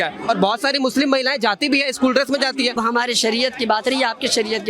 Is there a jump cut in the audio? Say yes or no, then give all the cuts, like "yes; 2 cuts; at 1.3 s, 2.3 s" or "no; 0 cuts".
yes; 1 cut; at 2.8 s